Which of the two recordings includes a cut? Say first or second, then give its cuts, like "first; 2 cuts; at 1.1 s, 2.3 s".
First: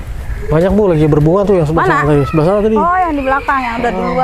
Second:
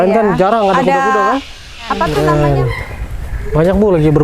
second; 1 cut; at 2.1 s